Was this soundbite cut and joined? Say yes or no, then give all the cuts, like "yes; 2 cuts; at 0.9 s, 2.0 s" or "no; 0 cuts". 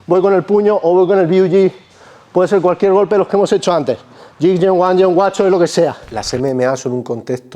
yes; 1 cut; at 6.1 s